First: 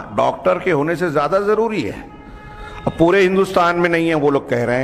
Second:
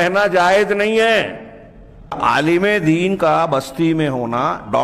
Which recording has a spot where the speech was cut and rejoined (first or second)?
second